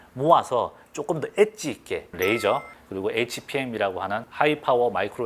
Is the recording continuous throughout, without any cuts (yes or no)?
no